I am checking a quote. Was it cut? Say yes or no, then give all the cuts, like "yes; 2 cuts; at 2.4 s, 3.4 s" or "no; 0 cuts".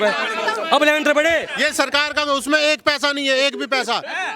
yes; 1 cut; at 1.6 s